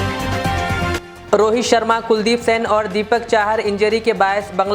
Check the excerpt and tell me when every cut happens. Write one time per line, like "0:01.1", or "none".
0:00.9